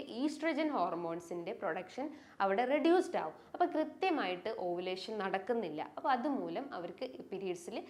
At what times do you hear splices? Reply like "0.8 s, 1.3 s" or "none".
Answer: none